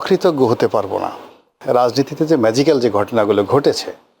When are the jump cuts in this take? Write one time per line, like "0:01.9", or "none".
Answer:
0:01.5